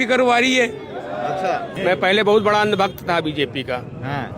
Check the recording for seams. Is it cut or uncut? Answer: cut